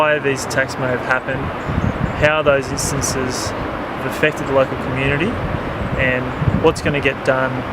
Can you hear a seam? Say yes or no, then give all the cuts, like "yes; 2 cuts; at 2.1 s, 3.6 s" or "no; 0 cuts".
yes; 1 cut; at 1.0 s